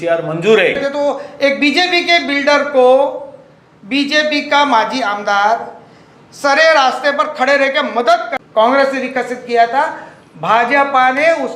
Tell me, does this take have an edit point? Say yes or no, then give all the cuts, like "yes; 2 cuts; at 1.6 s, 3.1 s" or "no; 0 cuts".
yes; 2 cuts; at 0.8 s, 8.3 s